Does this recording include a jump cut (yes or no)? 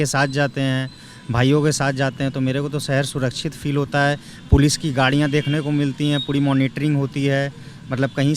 no